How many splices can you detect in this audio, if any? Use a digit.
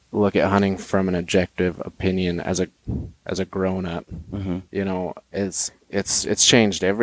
1